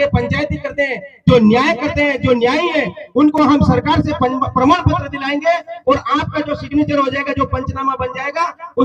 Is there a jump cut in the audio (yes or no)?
no